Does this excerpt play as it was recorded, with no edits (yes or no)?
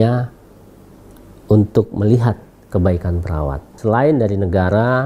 no